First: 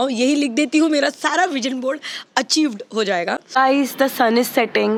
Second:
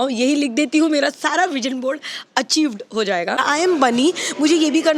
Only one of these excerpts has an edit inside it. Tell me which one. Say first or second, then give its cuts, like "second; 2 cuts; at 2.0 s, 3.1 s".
second; 1 cut; at 3.4 s